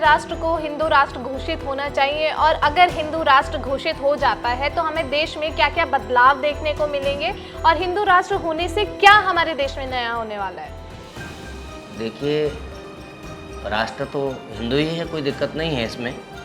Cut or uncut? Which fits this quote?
uncut